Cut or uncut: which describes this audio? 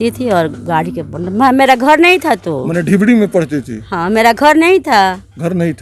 uncut